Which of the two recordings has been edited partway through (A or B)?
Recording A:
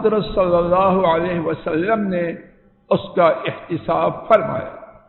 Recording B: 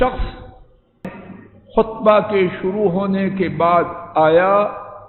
B